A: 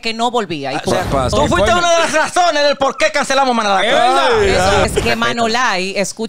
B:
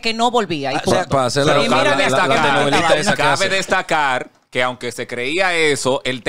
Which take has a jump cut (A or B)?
A